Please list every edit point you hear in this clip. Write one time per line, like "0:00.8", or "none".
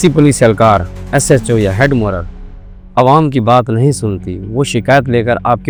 none